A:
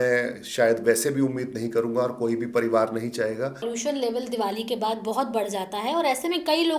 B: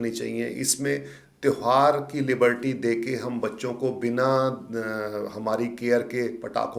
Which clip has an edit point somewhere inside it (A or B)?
A